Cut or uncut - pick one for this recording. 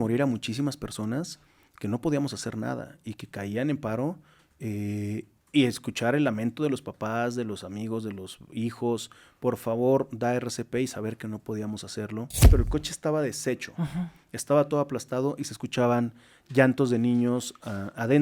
cut